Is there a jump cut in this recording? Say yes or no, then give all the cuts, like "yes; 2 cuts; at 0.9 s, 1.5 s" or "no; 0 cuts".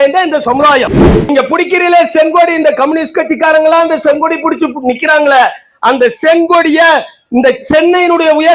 yes; 1 cut; at 1.3 s